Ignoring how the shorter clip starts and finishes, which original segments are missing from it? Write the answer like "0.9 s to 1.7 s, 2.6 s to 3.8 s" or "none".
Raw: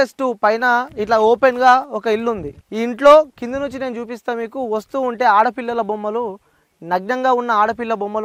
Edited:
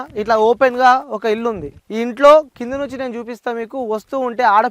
none